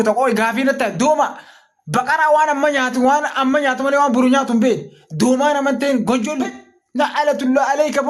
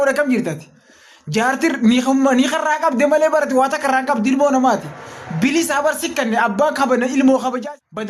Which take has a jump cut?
first; 1 cut; at 1.4 s

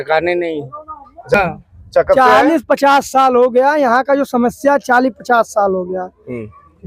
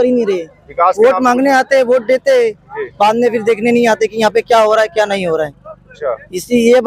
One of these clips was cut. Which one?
first; 1 cut; at 1.3 s

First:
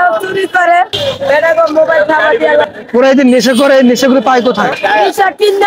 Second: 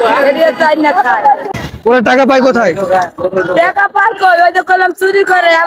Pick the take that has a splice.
first; 3 cuts; at 1.0 s, 2.7 s, 4.7 s

